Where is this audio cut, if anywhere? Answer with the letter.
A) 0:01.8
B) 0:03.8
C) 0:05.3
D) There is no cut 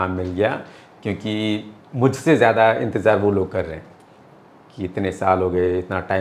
D